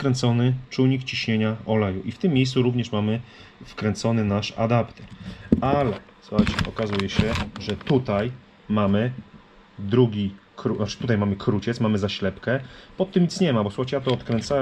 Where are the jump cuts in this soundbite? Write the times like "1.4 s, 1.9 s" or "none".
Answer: none